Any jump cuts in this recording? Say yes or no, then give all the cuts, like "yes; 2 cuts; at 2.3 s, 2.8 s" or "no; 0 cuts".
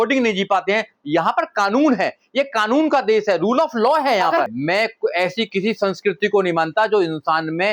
yes; 2 cuts; at 0.9 s, 4.5 s